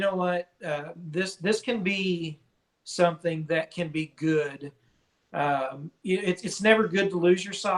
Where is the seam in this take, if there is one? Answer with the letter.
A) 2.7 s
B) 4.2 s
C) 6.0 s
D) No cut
D